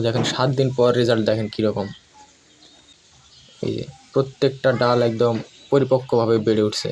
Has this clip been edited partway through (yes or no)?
yes